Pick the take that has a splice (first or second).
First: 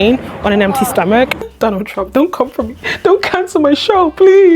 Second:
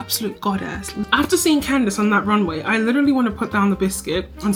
first